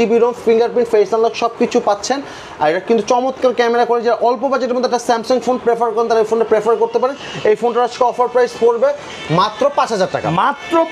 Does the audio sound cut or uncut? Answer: uncut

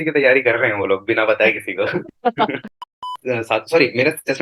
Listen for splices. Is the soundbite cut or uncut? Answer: cut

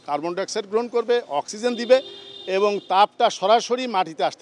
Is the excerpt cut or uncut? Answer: uncut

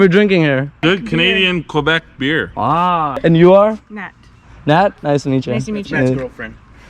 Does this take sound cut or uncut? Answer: cut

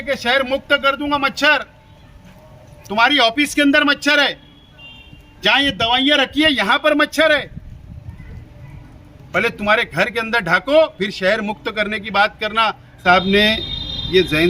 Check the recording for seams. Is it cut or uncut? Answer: cut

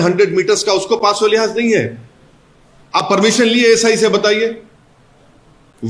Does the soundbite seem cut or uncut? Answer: uncut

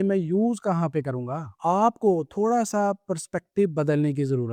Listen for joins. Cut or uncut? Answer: uncut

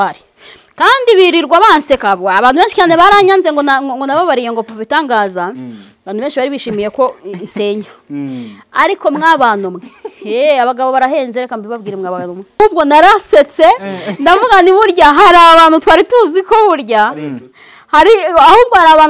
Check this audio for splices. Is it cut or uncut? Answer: cut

